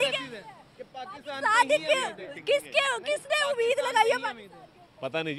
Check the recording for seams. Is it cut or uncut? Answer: uncut